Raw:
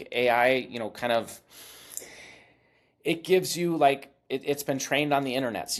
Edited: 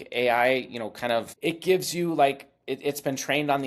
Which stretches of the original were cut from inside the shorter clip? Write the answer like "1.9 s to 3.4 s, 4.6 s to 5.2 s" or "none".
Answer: 1.3 s to 2.9 s